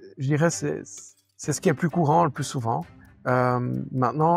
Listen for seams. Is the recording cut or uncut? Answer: uncut